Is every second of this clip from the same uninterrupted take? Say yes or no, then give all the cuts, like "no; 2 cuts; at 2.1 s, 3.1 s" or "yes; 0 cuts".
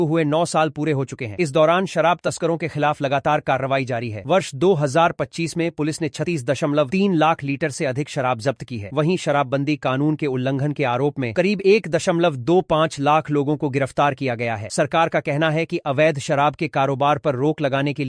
yes; 0 cuts